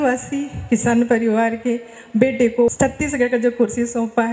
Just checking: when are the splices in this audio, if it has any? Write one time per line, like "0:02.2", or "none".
0:02.7